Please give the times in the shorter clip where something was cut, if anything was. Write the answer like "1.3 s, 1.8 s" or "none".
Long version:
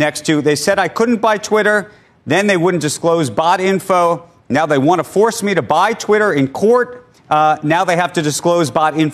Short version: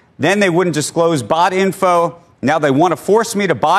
none

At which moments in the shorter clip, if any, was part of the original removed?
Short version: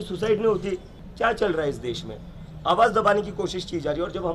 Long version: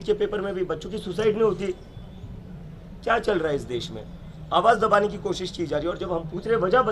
1.0 s

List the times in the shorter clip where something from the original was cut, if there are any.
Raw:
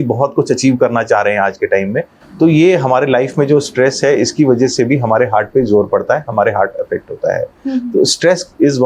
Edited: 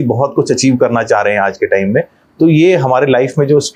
none

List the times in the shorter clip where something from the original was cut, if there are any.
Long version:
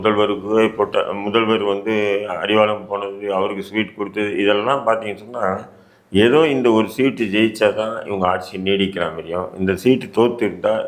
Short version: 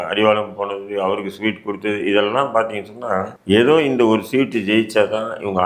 3.3 s

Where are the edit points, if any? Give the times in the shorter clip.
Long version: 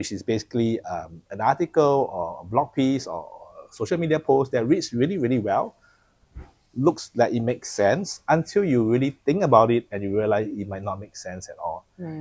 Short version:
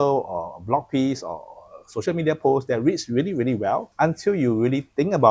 3.9 s

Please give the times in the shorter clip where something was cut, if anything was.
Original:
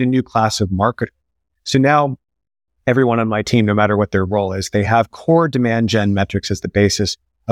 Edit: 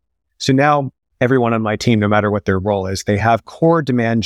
1.0 s

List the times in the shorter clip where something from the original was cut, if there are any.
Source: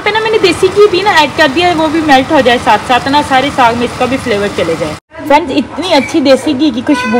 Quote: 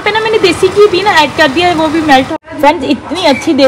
2.3 s

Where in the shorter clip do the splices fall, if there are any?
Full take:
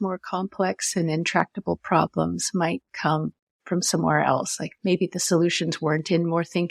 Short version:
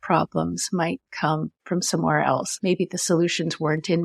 1.5 s, 2.5 s

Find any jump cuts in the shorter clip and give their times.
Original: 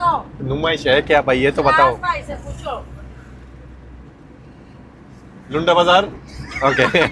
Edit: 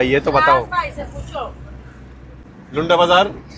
2.4 s

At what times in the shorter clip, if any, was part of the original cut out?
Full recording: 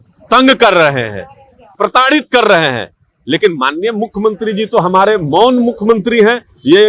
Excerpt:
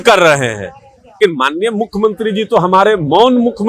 1.2 s

